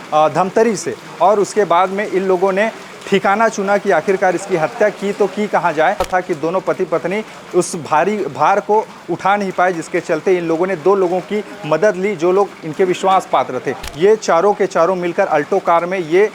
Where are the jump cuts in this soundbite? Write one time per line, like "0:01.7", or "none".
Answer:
0:06.1
0:13.8